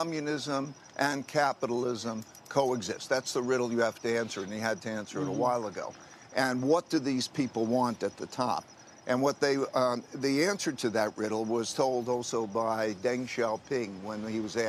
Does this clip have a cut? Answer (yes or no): no